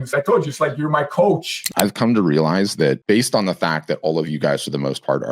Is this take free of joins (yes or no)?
no